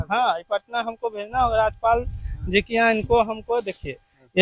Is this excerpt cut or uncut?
uncut